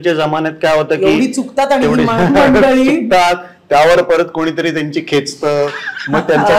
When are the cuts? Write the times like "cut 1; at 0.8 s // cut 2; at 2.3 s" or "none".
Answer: none